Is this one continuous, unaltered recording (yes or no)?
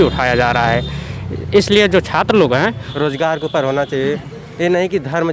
no